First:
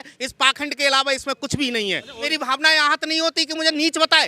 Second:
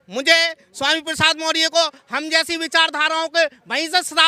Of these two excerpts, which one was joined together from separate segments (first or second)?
first